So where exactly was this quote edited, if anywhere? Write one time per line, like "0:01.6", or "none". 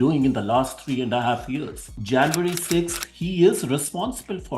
0:01.9